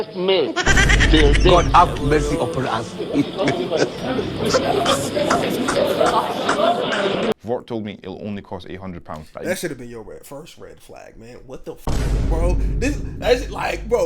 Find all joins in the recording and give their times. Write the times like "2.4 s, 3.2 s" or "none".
7.4 s